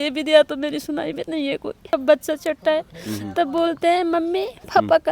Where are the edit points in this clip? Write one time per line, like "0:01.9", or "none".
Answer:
0:01.8